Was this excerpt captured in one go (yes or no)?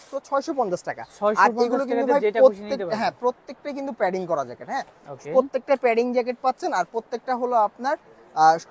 yes